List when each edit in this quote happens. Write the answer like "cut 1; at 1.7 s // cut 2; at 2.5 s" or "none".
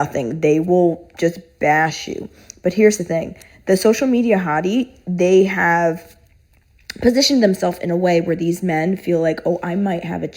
none